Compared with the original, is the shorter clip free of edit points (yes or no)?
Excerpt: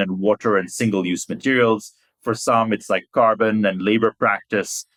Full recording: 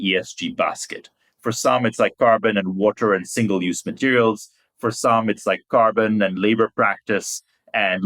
yes